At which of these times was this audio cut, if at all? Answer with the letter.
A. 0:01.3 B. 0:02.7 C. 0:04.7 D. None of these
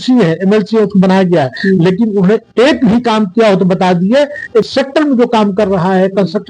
C